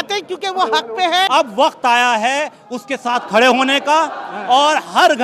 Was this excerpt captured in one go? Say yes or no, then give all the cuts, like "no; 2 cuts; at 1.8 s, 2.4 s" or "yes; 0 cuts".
no; 1 cut; at 1.3 s